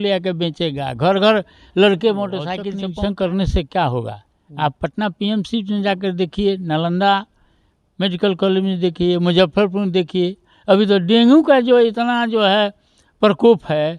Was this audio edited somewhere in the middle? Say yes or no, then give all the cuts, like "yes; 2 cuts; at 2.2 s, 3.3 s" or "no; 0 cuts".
yes; 1 cut; at 2.6 s